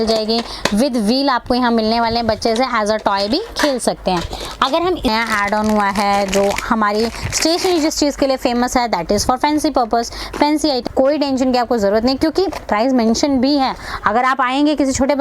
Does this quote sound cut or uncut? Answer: cut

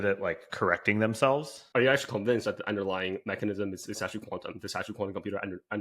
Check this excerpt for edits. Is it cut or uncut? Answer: cut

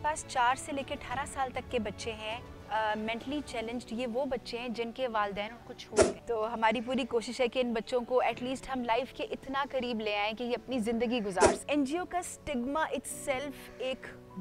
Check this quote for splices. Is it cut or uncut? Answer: cut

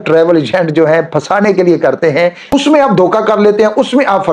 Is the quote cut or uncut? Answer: cut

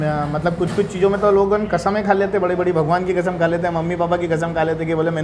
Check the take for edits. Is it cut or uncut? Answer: uncut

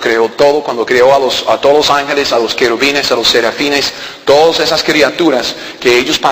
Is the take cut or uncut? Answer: uncut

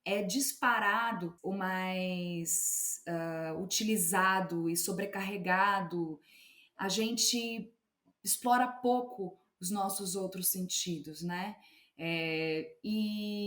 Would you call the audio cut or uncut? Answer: cut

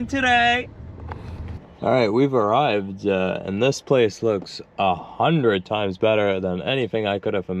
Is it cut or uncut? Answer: cut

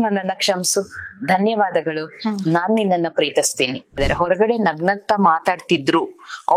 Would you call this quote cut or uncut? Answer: cut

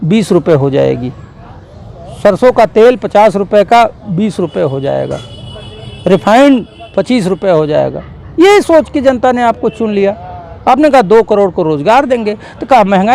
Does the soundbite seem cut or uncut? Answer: uncut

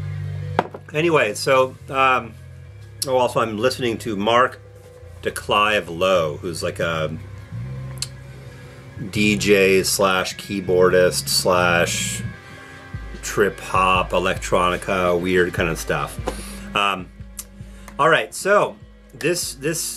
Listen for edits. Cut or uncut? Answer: uncut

